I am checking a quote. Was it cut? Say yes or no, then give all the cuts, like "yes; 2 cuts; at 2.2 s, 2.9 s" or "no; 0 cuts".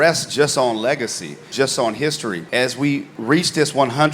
yes; 2 cuts; at 1.5 s, 2.5 s